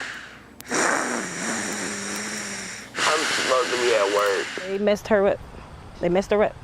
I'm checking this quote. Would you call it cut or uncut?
cut